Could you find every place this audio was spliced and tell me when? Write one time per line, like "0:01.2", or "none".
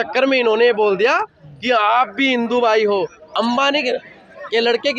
0:03.2